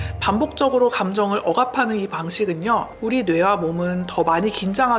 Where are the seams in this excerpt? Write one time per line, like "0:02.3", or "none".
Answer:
0:03.0